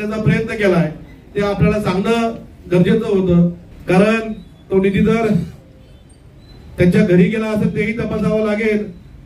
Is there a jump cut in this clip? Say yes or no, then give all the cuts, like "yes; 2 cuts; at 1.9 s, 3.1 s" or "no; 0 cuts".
yes; 1 cut; at 3.7 s